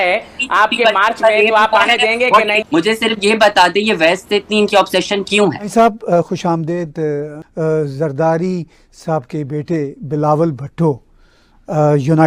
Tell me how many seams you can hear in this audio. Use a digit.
0